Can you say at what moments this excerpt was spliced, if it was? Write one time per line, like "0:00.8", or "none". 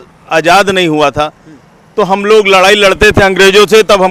none